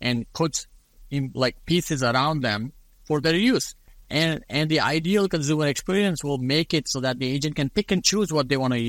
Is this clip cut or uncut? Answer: uncut